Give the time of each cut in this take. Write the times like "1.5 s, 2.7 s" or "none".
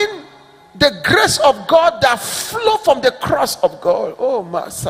none